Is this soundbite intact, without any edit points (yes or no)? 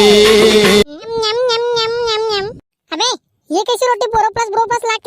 no